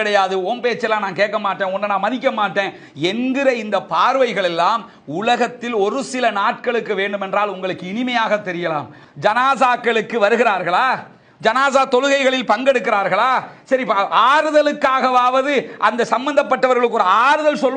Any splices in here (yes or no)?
yes